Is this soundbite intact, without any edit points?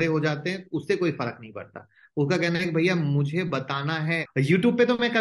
no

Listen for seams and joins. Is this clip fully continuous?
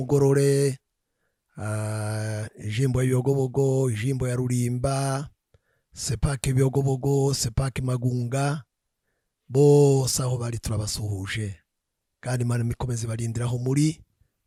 yes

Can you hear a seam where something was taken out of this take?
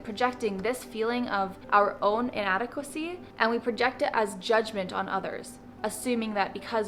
no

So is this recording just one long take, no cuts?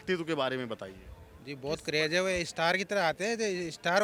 yes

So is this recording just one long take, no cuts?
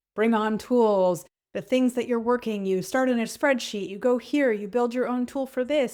yes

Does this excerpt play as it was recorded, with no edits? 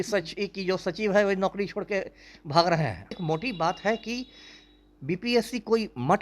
no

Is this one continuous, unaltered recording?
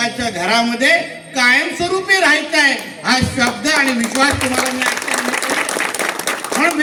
yes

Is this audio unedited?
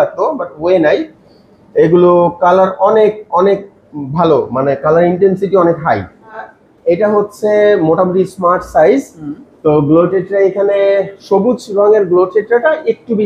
no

